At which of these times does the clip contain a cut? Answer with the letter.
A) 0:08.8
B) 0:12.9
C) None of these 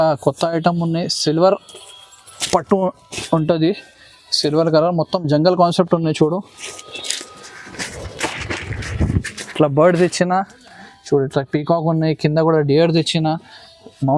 C